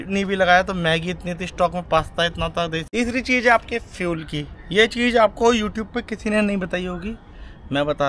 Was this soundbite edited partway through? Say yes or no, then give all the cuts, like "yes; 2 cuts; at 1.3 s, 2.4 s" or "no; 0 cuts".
yes; 1 cut; at 2.8 s